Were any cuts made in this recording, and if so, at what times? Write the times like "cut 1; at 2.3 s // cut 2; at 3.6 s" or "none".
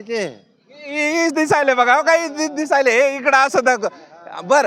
none